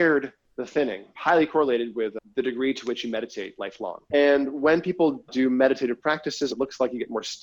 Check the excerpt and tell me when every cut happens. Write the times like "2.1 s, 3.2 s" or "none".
1.1 s, 2.2 s, 4.0 s, 5.3 s, 6.5 s